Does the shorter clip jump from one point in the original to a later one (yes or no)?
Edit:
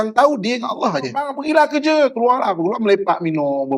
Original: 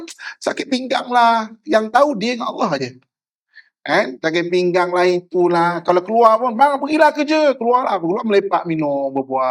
yes